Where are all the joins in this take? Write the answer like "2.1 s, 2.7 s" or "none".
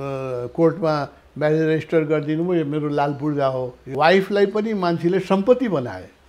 3.8 s

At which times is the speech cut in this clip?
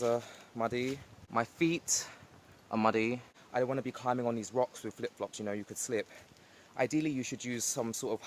1.1 s, 3.3 s

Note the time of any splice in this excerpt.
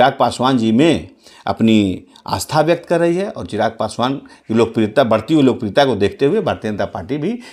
none

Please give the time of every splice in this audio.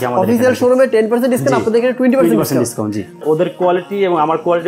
3.2 s

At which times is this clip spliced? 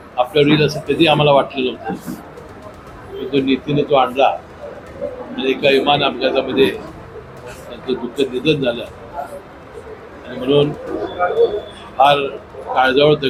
none

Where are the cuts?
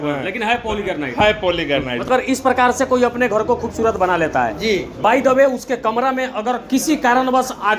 2.1 s

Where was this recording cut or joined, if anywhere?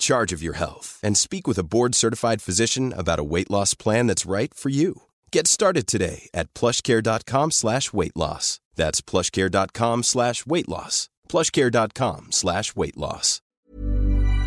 13.4 s

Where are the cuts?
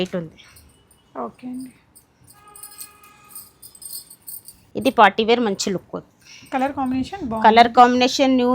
none

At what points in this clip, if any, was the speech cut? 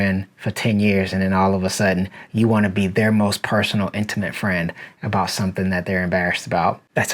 none

